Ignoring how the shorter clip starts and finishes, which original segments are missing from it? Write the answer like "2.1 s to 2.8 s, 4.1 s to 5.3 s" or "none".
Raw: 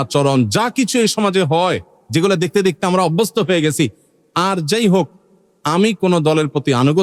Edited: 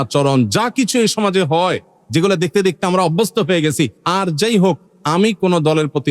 4.0 s to 4.3 s, 5.2 s to 5.5 s

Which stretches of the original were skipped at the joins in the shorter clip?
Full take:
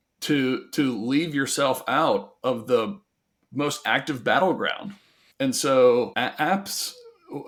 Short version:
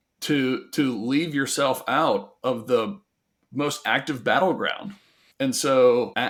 none

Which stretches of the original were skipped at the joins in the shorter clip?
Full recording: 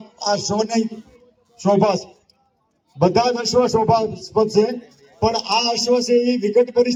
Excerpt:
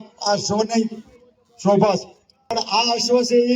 2.6 s to 5.4 s

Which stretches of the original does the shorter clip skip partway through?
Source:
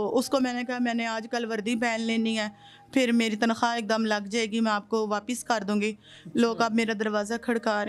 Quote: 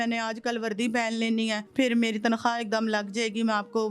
2.5 s to 2.8 s

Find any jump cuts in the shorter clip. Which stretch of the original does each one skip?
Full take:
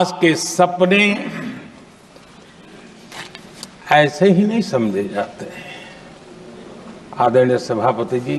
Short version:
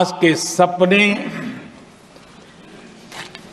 none

